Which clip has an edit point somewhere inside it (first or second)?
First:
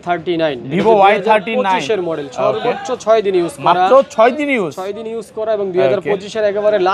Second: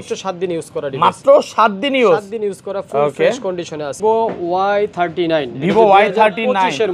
second